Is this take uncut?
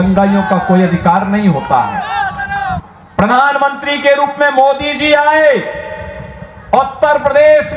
no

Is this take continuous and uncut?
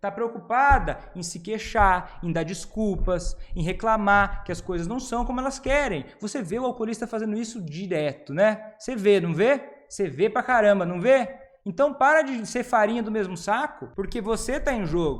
no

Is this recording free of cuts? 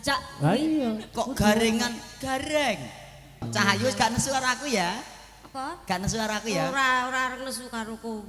no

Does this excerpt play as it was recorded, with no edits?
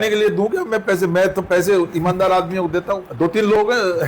no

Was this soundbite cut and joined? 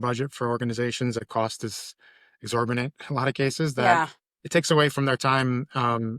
yes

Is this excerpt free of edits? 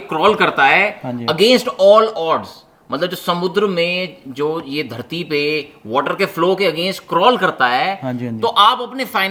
yes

